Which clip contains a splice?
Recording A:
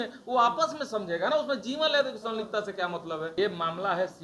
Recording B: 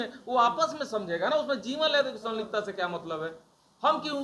A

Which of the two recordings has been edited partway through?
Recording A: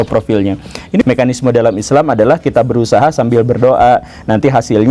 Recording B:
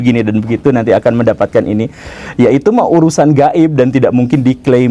A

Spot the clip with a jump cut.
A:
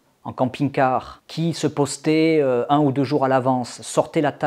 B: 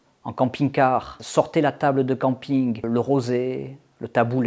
B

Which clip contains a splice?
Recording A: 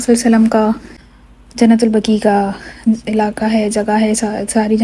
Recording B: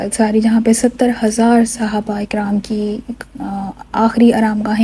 A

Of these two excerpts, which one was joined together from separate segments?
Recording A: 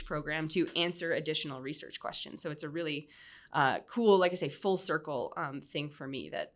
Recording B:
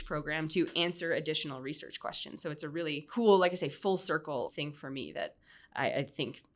B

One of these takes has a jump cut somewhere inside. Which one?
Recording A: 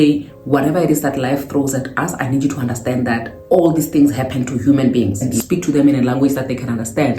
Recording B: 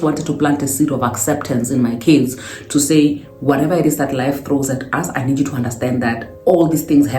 A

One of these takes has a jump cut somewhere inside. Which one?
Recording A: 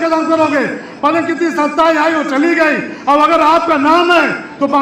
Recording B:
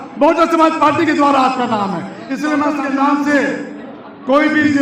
B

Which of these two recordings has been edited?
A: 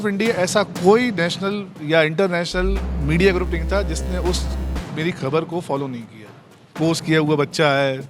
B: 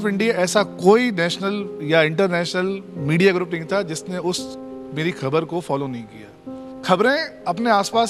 A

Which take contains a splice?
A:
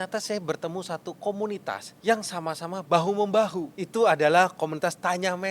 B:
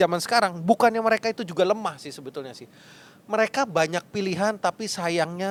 A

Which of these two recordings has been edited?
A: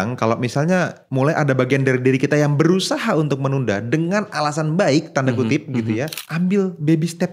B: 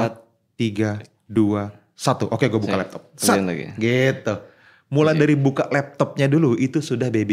A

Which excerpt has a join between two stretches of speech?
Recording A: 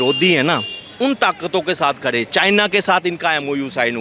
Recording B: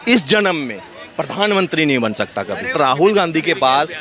B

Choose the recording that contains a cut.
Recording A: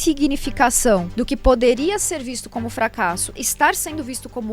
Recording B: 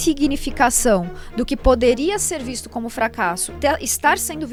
A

